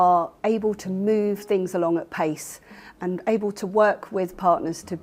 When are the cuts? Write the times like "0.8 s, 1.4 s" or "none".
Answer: none